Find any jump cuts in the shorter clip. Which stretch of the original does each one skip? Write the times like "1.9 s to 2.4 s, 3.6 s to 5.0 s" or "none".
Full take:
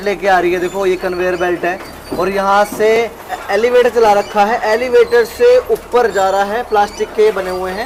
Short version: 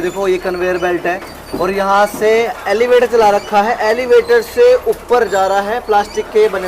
3.0 s to 3.2 s